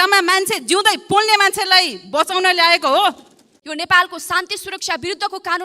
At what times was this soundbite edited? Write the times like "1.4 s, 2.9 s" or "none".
3.6 s

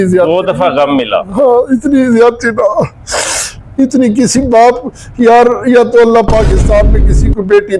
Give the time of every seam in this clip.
none

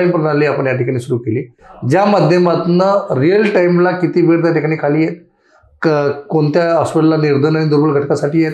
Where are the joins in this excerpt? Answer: none

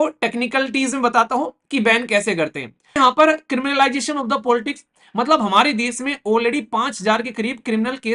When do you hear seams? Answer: 2.9 s

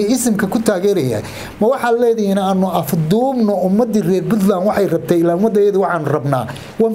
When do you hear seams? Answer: none

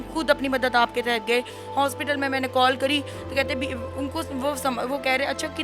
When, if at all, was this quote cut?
none

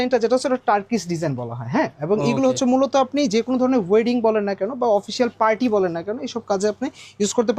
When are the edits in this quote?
none

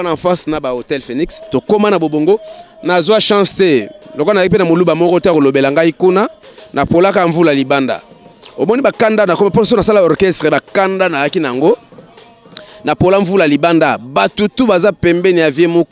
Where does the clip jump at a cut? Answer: none

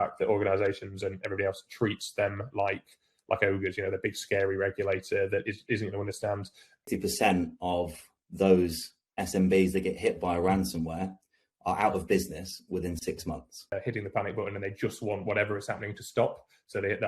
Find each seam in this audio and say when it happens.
6.8 s, 13.7 s

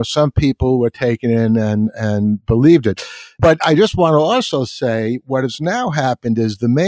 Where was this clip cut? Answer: 3.4 s

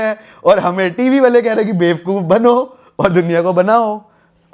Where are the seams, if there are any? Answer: none

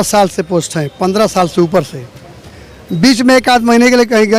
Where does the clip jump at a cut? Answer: none

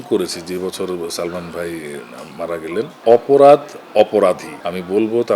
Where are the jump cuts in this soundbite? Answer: 3.0 s, 4.5 s

